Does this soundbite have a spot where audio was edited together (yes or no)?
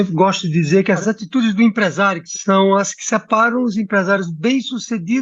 yes